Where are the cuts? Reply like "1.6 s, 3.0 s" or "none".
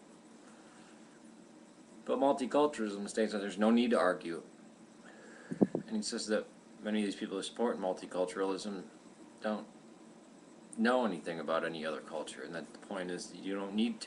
none